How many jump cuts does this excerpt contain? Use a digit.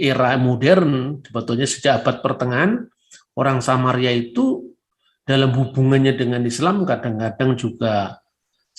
0